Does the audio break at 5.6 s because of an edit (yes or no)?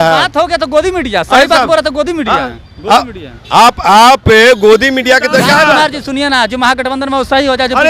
yes